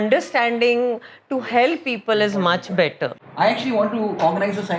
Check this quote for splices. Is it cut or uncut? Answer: cut